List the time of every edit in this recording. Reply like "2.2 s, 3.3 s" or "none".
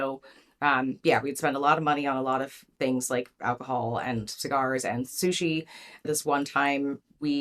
6.0 s

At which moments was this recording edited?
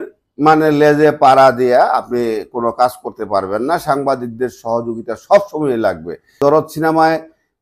6.3 s

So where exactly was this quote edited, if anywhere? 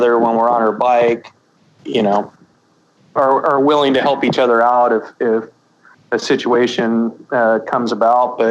1.3 s, 2.5 s

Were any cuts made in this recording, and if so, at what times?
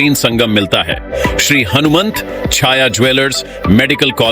1.1 s

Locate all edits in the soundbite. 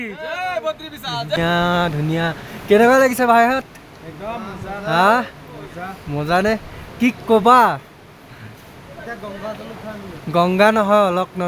1.4 s

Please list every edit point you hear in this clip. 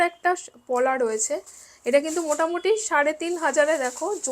none

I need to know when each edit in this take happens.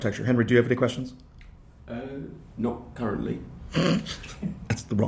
none

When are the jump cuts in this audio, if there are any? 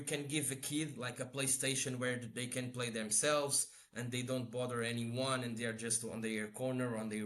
none

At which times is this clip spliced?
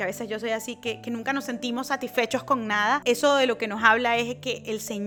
none

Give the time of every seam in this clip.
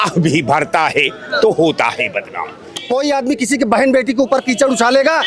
2.8 s

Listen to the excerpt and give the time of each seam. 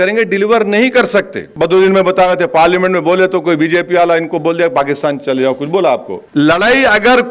1.4 s, 6.2 s

